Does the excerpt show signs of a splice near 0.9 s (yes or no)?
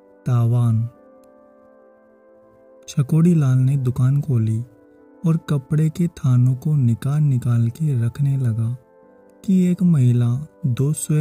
yes